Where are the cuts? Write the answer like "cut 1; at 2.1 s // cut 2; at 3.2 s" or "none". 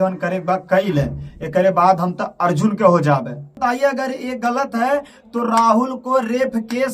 cut 1; at 3.6 s